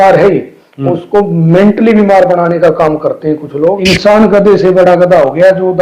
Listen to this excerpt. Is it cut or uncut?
cut